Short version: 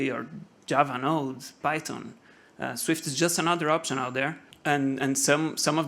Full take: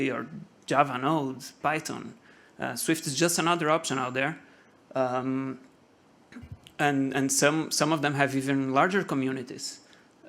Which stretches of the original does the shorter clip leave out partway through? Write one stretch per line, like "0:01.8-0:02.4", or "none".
0:04.5-0:06.6